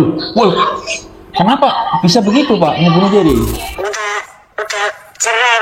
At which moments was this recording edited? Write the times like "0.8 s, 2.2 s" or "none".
3.7 s

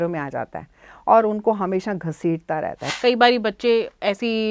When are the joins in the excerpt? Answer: 2.8 s

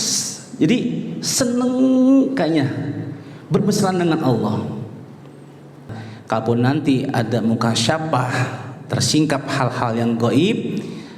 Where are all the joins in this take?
6.0 s

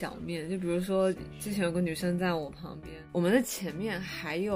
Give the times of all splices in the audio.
3.0 s

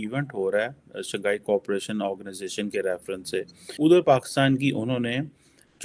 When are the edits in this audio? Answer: 3.7 s

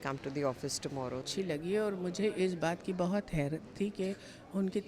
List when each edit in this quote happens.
1.3 s

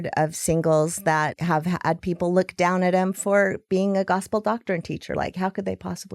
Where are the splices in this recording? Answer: 1.4 s

